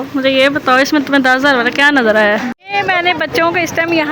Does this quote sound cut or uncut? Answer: cut